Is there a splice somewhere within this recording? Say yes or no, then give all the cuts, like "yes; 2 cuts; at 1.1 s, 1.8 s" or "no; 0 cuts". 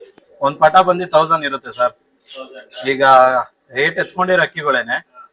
no; 0 cuts